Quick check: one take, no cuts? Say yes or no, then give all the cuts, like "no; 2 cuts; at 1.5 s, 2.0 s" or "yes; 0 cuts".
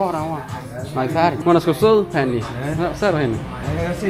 no; 1 cut; at 1.4 s